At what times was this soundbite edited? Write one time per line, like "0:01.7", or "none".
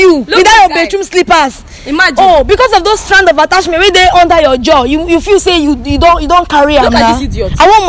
none